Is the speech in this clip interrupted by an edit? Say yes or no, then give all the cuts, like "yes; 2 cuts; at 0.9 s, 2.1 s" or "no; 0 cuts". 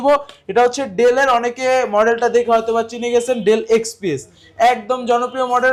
no; 0 cuts